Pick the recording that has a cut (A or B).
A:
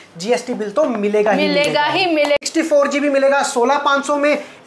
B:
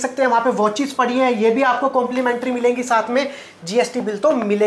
A